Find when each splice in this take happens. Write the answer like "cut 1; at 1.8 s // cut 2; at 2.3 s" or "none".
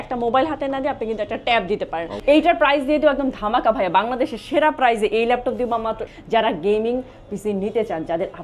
cut 1; at 2.1 s // cut 2; at 6.0 s